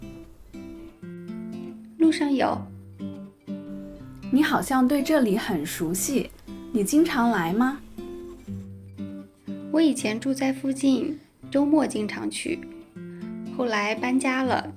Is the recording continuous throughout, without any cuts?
no; 2 cuts; at 7.8 s, 9.2 s

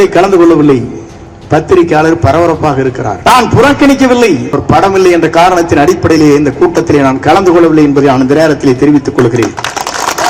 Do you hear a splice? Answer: yes; 2 cuts; at 3.1 s, 4.6 s

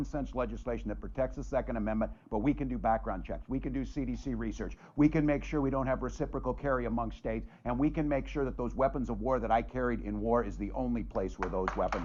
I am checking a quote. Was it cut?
no; 0 cuts

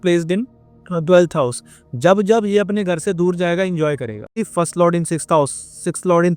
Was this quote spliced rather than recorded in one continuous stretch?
yes; 1 cut; at 4.3 s

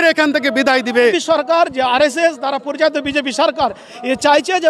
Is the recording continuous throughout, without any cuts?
no; 1 cut; at 1.1 s

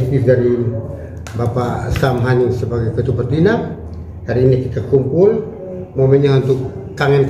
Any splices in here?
no; 0 cuts

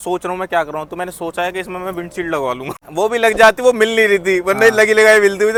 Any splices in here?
no; 0 cuts

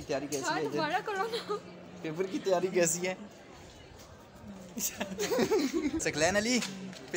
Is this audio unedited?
no; 1 cut; at 6.0 s

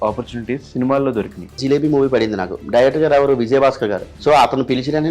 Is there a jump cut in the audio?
yes; 2 cuts; at 1.6 s, 4.1 s

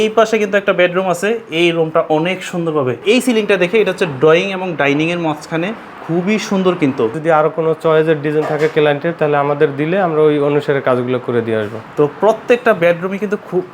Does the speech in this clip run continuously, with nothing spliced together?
no; 3 cuts; at 3.0 s, 7.2 s, 11.8 s

